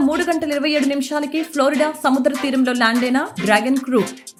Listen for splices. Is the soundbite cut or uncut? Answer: uncut